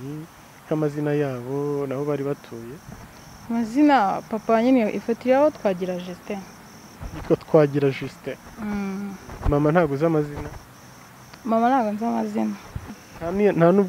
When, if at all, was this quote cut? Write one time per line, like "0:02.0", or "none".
0:12.9

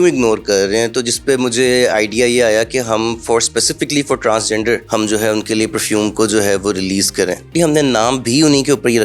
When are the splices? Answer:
0:04.8
0:07.5

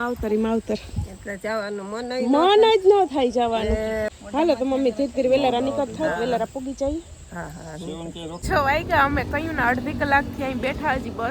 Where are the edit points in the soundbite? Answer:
0:04.1
0:08.5

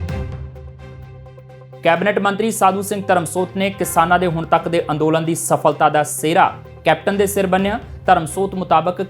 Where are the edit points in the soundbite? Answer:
0:01.8

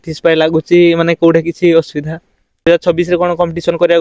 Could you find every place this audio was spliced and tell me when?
0:02.6

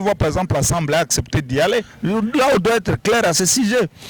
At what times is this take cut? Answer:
0:01.9

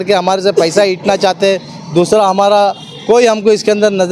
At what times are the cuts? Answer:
none

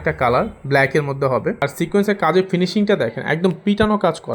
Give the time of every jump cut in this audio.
0:01.6

